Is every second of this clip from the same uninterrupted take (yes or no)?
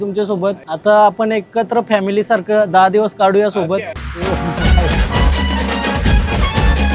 no